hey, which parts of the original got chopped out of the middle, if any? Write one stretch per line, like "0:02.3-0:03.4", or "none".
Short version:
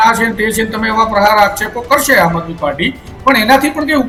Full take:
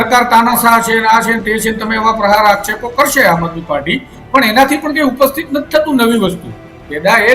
none